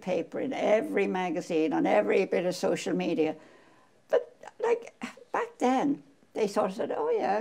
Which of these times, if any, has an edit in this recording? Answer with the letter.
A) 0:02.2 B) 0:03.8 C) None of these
C